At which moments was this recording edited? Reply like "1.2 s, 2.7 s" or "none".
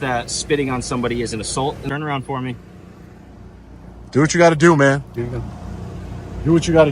1.8 s